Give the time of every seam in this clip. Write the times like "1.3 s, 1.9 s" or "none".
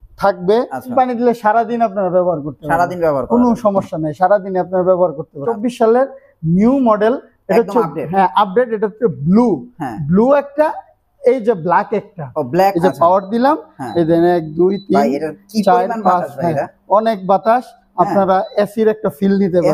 0.9 s, 5.5 s, 12.7 s